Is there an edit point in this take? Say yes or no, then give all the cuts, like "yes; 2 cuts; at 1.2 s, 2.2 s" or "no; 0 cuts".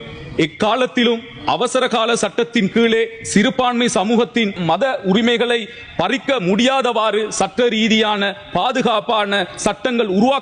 no; 0 cuts